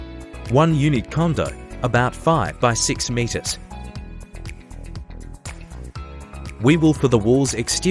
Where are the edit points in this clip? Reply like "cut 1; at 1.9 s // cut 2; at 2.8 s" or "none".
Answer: cut 1; at 3.4 s // cut 2; at 6.6 s

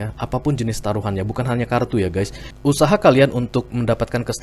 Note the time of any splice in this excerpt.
cut 1; at 2.4 s

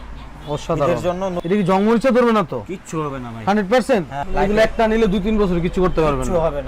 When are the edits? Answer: cut 1; at 1.4 s // cut 2; at 4.2 s

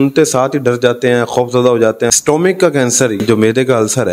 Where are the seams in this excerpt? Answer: cut 1; at 2.1 s // cut 2; at 3.2 s

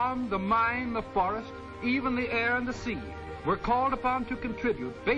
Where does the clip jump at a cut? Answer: none

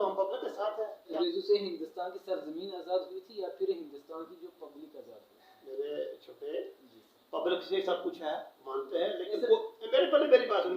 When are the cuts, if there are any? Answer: cut 1; at 1.1 s

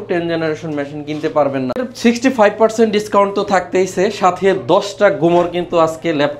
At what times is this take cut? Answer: cut 1; at 1.9 s

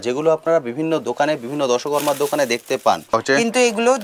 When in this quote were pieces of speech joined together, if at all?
cut 1; at 3.1 s

